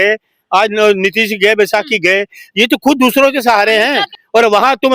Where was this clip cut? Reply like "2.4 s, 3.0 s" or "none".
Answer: 4.0 s

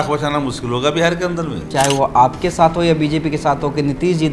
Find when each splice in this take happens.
1.7 s

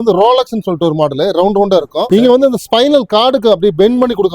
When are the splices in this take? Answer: 2.1 s

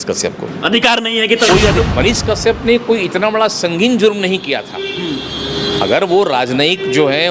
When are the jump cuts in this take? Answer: 1.8 s

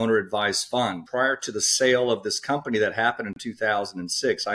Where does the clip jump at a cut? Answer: 1.0 s

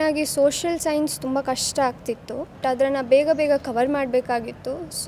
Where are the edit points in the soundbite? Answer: 2.5 s

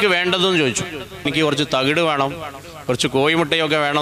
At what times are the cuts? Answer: 1.2 s

